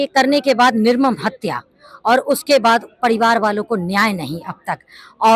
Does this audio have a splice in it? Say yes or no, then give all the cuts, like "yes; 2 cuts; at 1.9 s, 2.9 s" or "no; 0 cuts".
no; 0 cuts